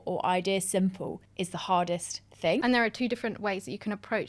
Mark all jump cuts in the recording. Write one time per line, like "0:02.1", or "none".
0:02.6

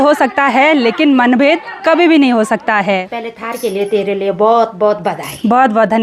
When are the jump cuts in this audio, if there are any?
0:03.0

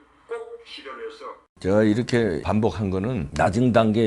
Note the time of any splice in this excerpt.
0:01.0

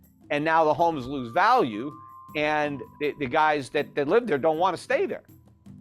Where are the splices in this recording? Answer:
0:02.8

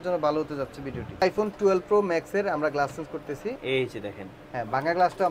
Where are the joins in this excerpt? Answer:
0:01.2
0:03.6

